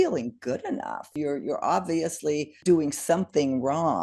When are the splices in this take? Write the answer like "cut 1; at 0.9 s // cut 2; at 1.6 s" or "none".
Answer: cut 1; at 1.1 s // cut 2; at 2.5 s